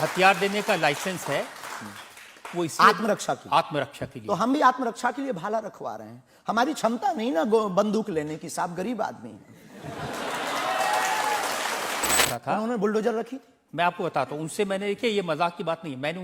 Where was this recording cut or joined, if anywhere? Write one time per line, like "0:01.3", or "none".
0:12.2